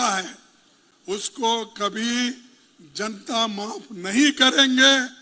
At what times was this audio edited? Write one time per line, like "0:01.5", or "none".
none